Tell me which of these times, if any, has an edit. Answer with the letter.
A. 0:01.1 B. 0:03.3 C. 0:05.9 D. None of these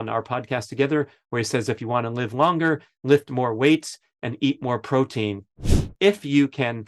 C